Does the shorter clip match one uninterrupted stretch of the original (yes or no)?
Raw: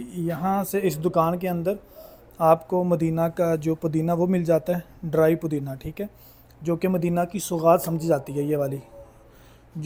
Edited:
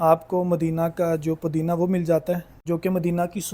no